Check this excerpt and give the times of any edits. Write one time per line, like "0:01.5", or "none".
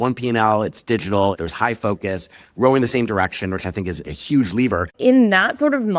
0:01.4
0:04.1
0:04.9